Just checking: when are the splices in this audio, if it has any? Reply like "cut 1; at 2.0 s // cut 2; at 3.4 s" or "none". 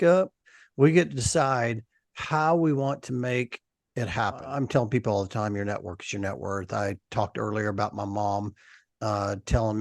cut 1; at 4.4 s